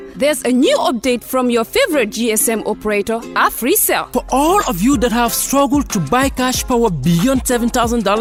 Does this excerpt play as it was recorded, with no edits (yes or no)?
yes